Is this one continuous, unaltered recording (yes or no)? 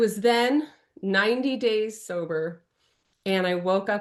yes